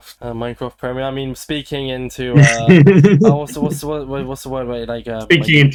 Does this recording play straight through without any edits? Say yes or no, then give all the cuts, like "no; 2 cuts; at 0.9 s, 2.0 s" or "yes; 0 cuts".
yes; 0 cuts